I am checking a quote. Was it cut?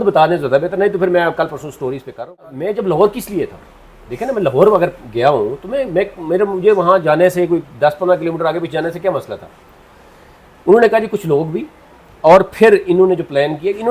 yes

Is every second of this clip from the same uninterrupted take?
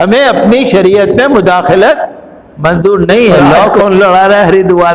no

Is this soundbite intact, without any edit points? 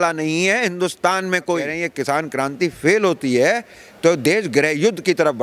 no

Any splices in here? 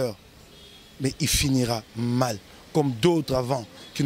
no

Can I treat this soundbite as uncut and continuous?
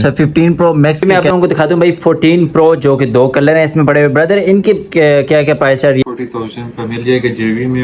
no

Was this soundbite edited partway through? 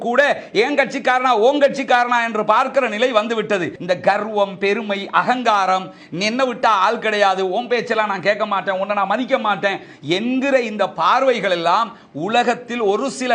yes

